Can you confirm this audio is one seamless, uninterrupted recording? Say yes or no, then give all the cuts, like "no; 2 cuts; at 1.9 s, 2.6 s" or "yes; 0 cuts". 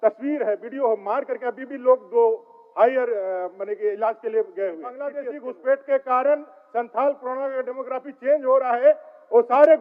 no; 1 cut; at 5.2 s